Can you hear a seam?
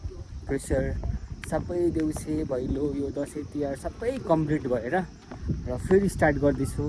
no; 0 cuts

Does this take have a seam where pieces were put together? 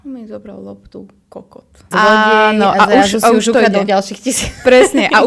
yes; 1 cut; at 1.8 s

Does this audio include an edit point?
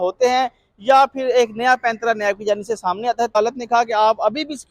yes; 1 cut; at 3.4 s

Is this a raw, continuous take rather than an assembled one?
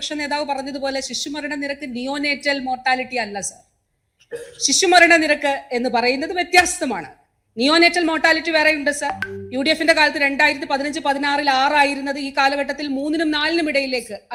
yes; 0 cuts

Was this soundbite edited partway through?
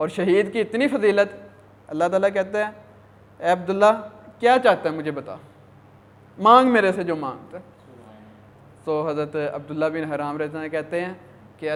no; 0 cuts

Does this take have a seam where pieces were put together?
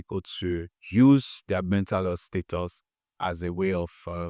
no; 0 cuts

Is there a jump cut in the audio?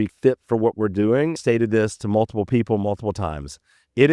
yes; 1 cut; at 1.4 s

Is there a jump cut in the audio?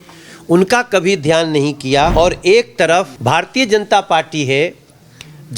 yes; 2 cuts; at 2.1 s, 3.1 s

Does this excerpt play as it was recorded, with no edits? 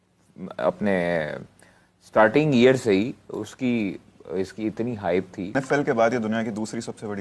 no; 1 cut; at 5.5 s

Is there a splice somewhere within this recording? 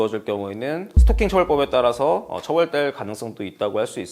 no; 0 cuts

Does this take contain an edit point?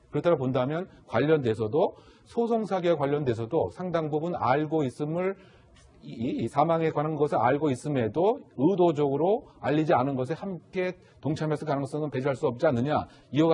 yes; 1 cut; at 10.3 s

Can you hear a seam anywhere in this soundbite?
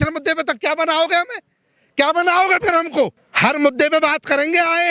yes; 1 cut; at 3.2 s

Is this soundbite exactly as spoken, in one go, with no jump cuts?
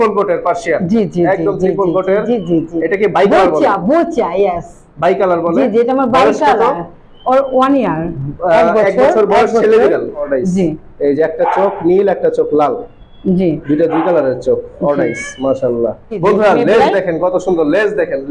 no; 2 cuts; at 10.2 s, 16.2 s

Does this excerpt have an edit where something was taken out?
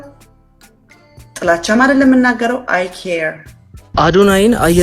yes; 1 cut; at 3.9 s

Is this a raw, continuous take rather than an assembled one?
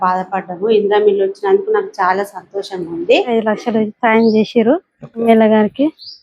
no; 2 cuts; at 3.3 s, 5.2 s

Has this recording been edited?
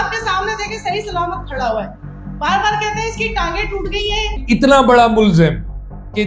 yes; 1 cut; at 4.4 s

